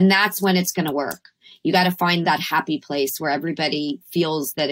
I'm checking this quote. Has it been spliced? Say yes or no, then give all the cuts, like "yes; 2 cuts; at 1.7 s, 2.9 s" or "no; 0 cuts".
yes; 1 cut; at 2.2 s